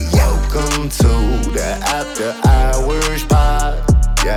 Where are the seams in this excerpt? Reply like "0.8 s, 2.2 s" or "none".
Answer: none